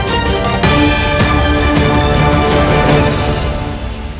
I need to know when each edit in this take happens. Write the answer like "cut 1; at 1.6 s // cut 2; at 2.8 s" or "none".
none